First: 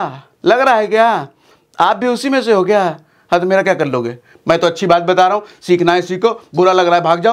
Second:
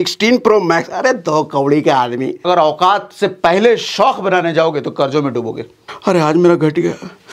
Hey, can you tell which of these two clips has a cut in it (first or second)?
second